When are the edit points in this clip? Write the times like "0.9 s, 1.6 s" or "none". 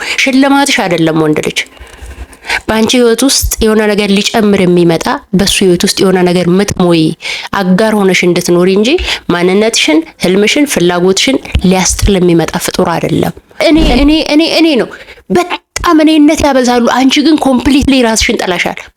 13.9 s